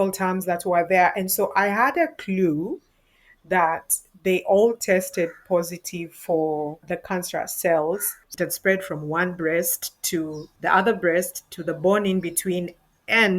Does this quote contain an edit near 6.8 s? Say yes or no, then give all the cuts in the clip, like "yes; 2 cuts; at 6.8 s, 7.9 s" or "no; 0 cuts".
yes; 3 cuts; at 6.8 s, 8.2 s, 10.4 s